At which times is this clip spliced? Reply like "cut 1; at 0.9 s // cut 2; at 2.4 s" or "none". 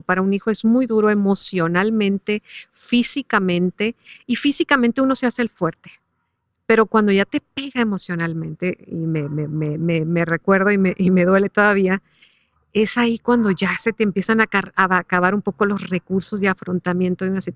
none